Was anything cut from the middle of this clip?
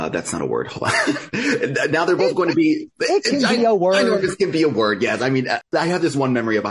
yes; 1 cut; at 5.6 s

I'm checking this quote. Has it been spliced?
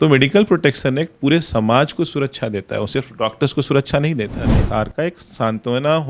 yes; 1 cut; at 4.6 s

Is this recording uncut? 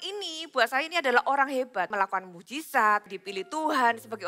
no; 2 cuts; at 1.9 s, 3.2 s

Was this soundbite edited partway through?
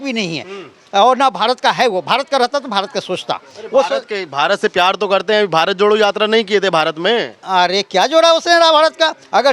no; 0 cuts

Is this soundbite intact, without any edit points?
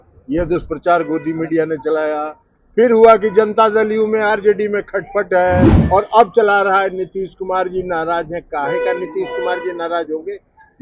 no; 1 cut; at 5.8 s

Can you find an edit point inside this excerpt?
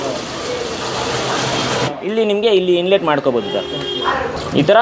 yes; 1 cut; at 1.8 s

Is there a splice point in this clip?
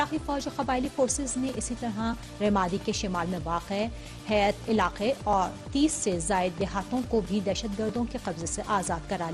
yes; 1 cut; at 1.6 s

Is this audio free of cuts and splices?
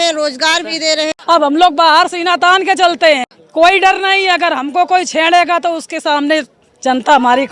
no; 2 cuts; at 1.1 s, 3.4 s

